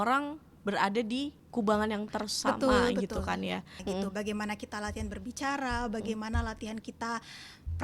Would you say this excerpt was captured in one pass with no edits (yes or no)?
no